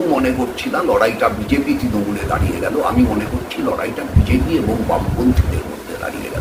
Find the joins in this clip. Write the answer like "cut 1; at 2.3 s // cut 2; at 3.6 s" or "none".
none